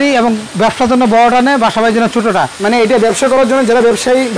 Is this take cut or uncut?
uncut